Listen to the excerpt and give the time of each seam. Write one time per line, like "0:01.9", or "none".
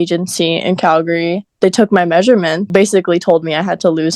0:01.4
0:02.7